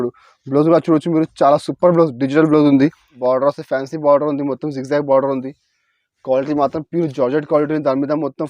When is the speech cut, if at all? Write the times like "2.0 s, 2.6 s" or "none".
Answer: 3.1 s